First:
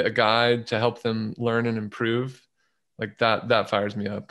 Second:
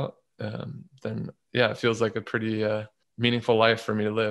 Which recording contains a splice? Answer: second; 1 cut; at 3.0 s

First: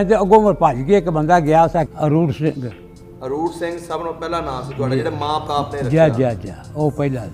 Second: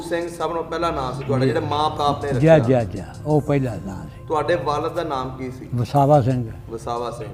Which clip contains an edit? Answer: first; 1 cut; at 1.8 s

